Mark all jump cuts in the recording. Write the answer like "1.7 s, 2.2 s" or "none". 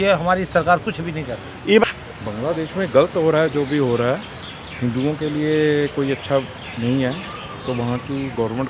1.8 s

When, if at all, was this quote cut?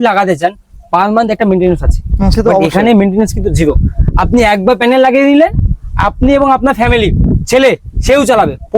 none

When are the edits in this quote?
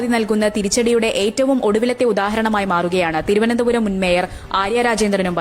none

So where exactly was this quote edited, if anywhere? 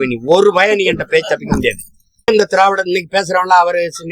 2.3 s

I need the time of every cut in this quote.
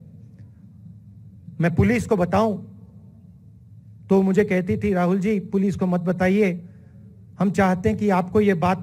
none

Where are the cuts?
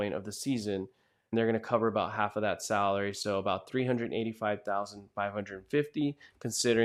none

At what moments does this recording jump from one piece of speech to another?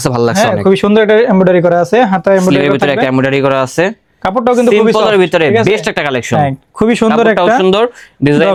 none

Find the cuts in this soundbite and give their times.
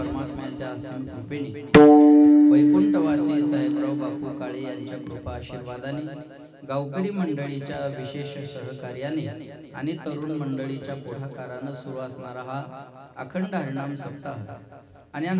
none

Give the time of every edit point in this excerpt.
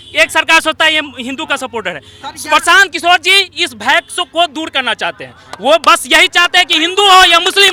none

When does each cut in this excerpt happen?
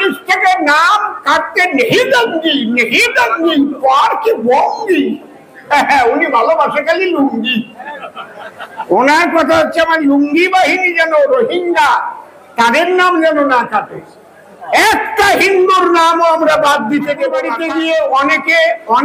17.6 s

